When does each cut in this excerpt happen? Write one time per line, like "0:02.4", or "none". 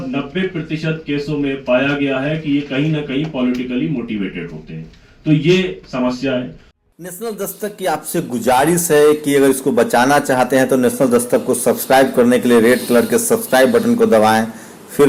none